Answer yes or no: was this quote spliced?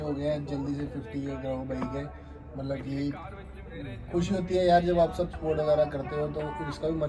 no